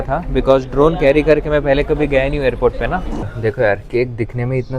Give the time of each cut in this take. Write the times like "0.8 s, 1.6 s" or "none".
3.3 s